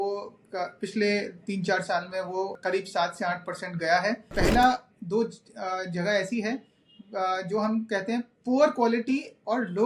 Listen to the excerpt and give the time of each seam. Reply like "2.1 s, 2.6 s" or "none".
2.6 s, 4.3 s